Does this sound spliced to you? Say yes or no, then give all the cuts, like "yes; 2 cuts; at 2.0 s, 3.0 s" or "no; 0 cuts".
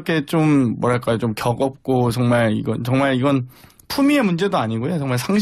no; 0 cuts